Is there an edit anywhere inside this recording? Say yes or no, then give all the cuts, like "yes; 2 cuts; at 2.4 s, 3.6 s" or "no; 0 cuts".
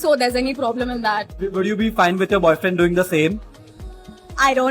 yes; 1 cut; at 1.6 s